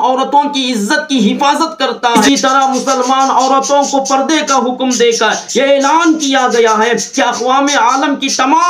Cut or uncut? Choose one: cut